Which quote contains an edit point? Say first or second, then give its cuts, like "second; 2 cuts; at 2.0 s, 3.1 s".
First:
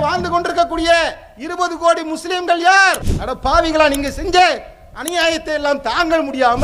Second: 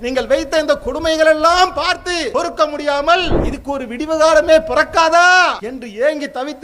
second; 3 cuts; at 2.3 s, 3.5 s, 5.7 s